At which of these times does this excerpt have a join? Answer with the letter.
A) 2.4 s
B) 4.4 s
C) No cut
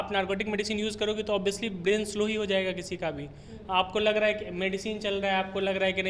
C